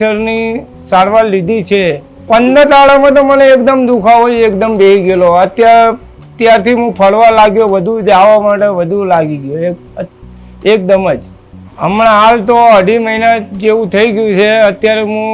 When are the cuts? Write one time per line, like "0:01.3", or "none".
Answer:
0:02.1